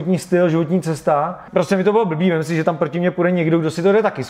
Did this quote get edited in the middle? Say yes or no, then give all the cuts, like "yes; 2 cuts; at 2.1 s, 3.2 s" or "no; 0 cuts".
yes; 1 cut; at 1.4 s